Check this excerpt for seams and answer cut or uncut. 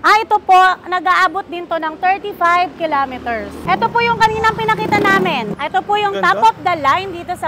cut